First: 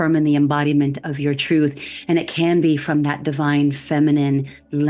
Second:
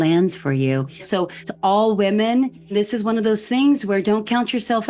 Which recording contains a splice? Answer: second; 2 cuts; at 1.2 s, 2.7 s

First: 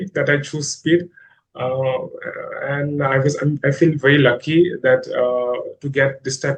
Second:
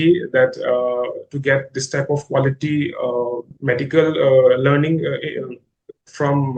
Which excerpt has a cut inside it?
second; 1 cut; at 3.5 s

